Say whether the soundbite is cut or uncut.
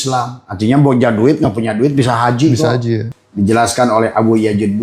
cut